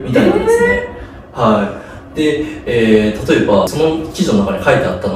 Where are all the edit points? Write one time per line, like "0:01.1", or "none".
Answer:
none